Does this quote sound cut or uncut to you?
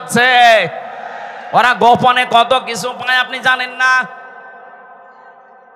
uncut